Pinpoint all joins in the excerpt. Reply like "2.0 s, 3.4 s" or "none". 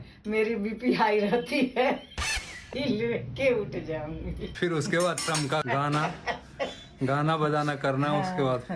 2.7 s, 4.5 s